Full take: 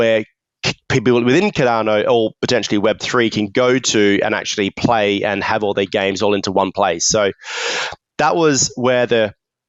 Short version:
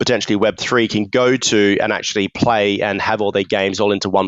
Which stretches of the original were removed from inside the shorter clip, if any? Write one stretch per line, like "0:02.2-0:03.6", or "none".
none